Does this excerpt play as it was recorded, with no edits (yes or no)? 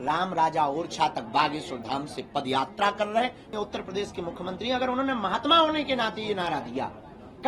no